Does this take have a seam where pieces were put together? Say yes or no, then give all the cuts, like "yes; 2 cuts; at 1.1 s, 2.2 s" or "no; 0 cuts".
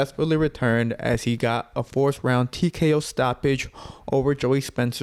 no; 0 cuts